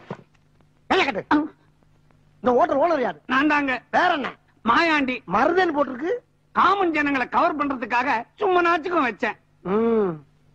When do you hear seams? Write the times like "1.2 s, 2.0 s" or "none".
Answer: none